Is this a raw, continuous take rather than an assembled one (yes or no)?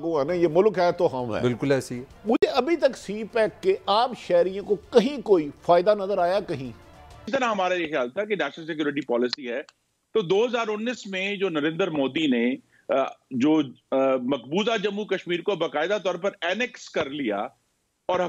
no